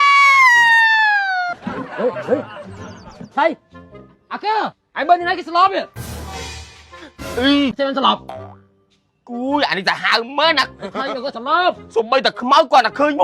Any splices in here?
yes; 2 cuts; at 4.8 s, 7.8 s

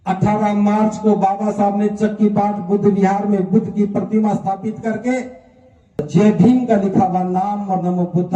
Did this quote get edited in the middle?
yes; 1 cut; at 6.1 s

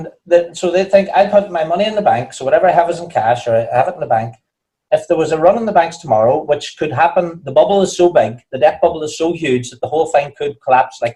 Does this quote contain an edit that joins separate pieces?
no; 0 cuts

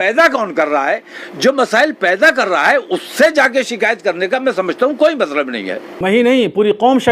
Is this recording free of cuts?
no; 1 cut; at 6.0 s

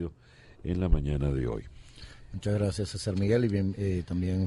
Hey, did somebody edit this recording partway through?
yes; 1 cut; at 3.1 s

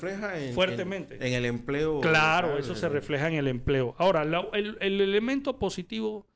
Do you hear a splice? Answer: no; 0 cuts

